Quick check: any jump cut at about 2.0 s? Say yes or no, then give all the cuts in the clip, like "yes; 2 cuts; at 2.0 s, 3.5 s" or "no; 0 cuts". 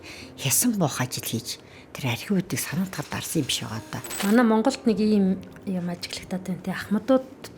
no; 1 cut; at 4.0 s